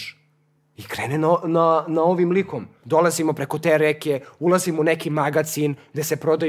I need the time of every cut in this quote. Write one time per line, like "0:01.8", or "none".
0:02.7